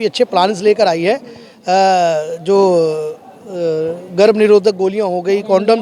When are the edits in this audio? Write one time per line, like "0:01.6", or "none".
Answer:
none